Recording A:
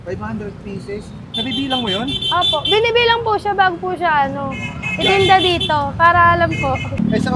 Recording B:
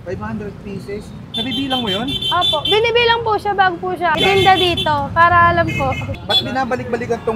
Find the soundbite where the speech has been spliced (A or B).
B